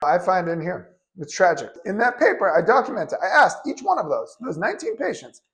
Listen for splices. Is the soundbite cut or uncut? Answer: cut